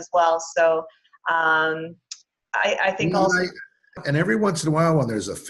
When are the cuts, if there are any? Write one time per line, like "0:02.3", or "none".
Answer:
0:04.0